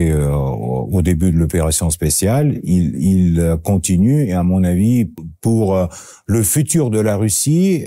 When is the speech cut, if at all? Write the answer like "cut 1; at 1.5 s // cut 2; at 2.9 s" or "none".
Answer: cut 1; at 5.2 s

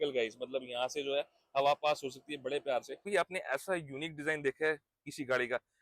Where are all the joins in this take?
cut 1; at 3.0 s

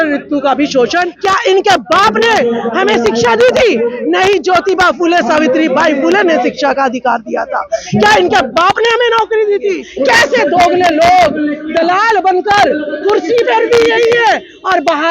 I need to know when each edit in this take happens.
cut 1; at 1.1 s // cut 2; at 9.9 s

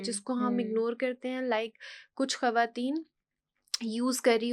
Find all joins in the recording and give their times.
none

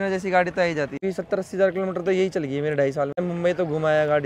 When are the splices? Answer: cut 1; at 1.0 s // cut 2; at 3.2 s

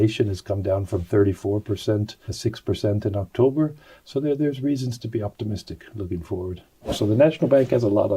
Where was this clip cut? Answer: cut 1; at 2.2 s // cut 2; at 6.8 s

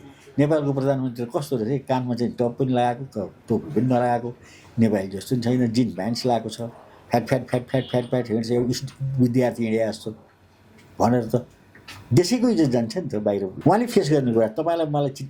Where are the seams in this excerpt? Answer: cut 1; at 13.5 s

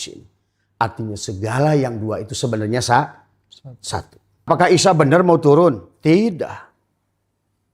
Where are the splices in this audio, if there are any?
cut 1; at 4.5 s

